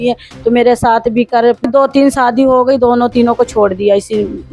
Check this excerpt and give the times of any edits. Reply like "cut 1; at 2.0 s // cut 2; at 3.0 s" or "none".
cut 1; at 1.6 s